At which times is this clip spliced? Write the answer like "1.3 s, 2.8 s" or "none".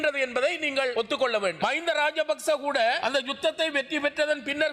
1.6 s, 3.0 s